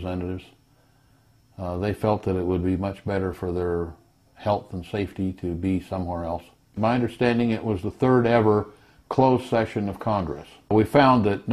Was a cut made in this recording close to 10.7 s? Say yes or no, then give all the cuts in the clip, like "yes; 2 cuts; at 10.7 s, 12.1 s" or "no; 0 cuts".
yes; 2 cuts; at 6.8 s, 10.7 s